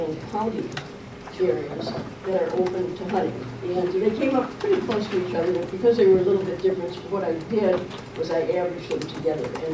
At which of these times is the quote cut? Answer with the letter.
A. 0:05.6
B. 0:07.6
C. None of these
B